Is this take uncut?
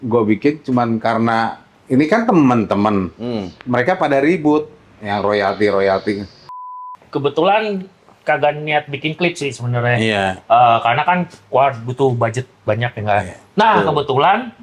no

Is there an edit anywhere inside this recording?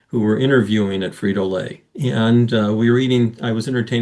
no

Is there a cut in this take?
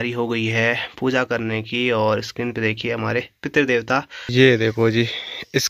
yes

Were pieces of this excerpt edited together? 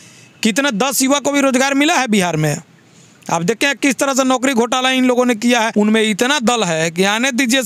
yes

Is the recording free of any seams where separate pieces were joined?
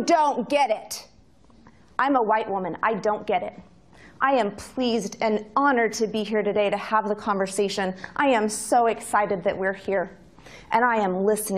no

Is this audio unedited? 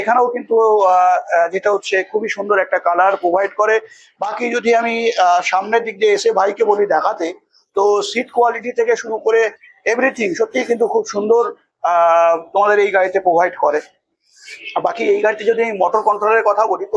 yes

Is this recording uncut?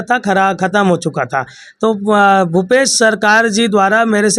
yes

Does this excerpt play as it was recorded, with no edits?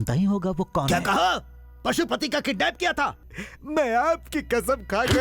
no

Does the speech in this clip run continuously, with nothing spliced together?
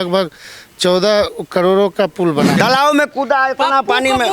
no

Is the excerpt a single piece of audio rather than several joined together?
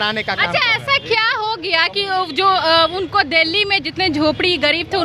yes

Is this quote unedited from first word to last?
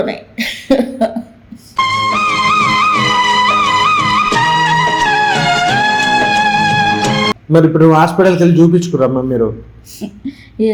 yes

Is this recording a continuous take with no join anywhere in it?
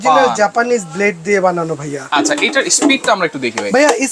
yes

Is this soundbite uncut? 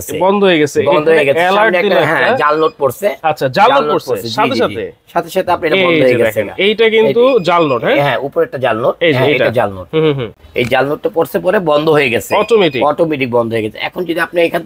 yes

